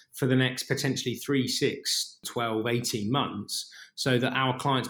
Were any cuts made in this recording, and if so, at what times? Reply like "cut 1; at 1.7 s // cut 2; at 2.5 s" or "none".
cut 1; at 2.2 s